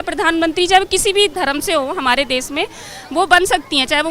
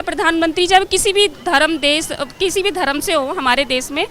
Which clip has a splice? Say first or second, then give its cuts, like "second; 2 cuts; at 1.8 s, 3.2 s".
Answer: first; 1 cut; at 1.4 s